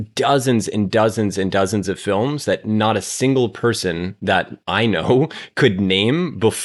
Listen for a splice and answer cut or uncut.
uncut